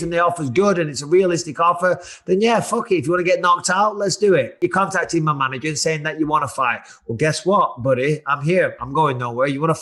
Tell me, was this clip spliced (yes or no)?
yes